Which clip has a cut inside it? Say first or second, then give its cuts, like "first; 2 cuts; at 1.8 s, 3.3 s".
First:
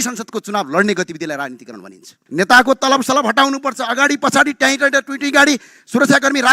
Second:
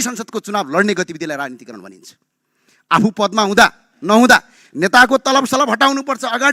first; 1 cut; at 2.1 s